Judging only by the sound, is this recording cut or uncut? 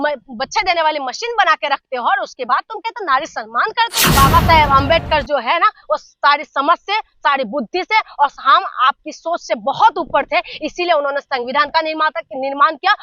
cut